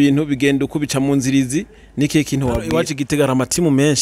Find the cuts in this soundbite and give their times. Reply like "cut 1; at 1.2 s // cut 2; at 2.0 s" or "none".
cut 1; at 2.9 s